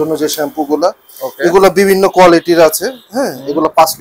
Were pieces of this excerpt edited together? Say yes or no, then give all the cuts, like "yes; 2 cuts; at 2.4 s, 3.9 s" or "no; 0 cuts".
no; 0 cuts